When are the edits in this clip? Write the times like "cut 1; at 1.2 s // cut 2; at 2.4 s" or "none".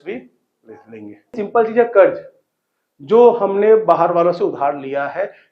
cut 1; at 1.4 s